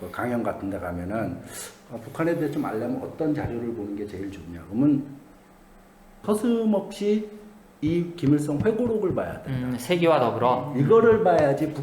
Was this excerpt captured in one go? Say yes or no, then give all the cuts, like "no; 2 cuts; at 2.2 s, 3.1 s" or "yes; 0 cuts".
no; 1 cut; at 6.2 s